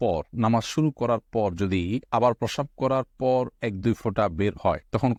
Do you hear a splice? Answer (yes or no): no